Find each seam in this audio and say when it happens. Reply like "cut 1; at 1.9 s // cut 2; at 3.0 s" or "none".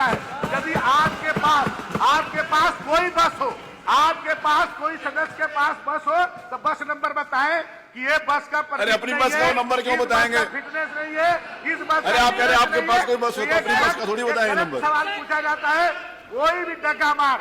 none